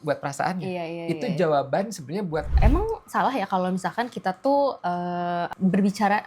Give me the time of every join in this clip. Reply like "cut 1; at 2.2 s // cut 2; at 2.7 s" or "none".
cut 1; at 2.5 s